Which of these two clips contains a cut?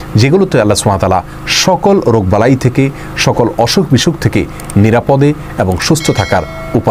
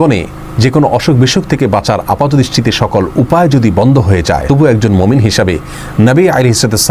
second; 1 cut; at 4.4 s

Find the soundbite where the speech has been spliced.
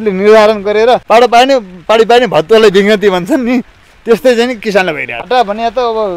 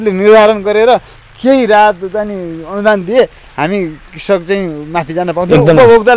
first; 2 cuts; at 1.0 s, 5.1 s

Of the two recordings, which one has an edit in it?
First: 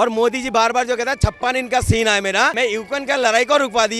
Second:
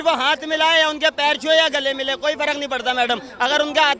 first; 1 cut; at 2.5 s

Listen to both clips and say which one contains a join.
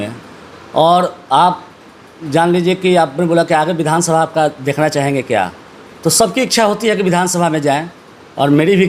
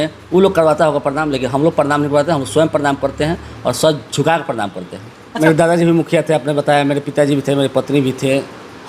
second; 1 cut; at 5.3 s

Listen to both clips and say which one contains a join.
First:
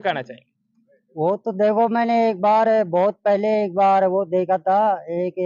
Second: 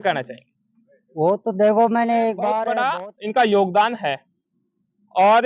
second; 1 cut; at 2.8 s

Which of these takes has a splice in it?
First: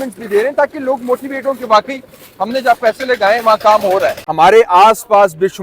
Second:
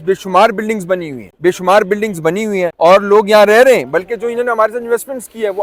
first; 1 cut; at 4.3 s

